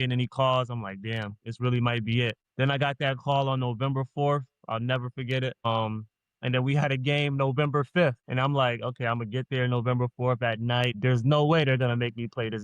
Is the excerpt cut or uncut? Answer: cut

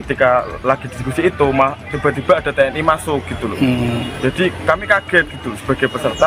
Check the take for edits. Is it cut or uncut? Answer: uncut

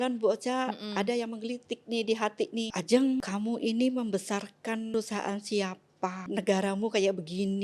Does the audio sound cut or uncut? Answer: cut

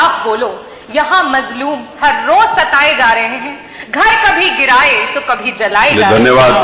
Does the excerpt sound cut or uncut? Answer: uncut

